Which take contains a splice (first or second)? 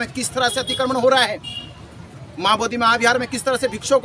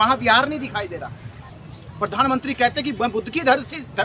second